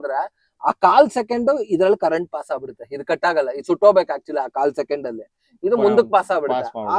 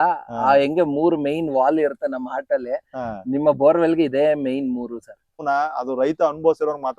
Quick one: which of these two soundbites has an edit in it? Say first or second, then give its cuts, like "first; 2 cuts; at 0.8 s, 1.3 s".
second; 1 cut; at 5.4 s